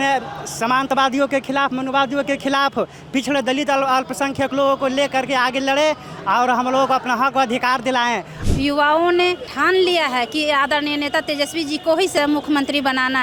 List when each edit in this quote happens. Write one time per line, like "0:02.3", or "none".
0:08.4
0:09.5
0:12.1